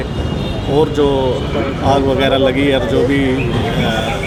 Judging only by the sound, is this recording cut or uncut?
uncut